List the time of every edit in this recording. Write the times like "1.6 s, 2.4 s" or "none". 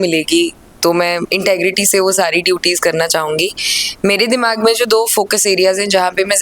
1.3 s